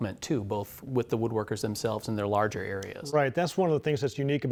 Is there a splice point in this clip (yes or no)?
no